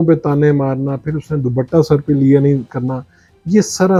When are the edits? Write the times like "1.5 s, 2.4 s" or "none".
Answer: none